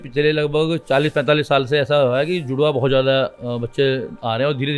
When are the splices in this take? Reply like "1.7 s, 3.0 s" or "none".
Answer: none

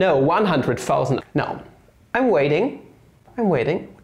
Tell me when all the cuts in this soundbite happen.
1.2 s

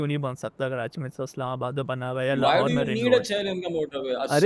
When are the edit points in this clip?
none

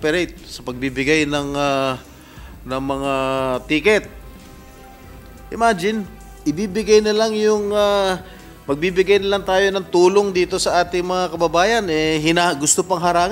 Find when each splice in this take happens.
4.2 s, 5.5 s

